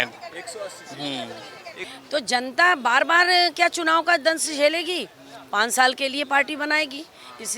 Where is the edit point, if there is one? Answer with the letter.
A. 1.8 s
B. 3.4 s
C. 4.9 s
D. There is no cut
A